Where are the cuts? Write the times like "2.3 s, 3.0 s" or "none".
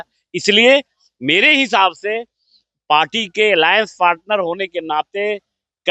none